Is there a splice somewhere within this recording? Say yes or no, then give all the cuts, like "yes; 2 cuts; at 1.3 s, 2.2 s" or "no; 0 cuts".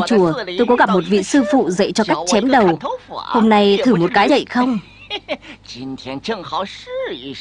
no; 0 cuts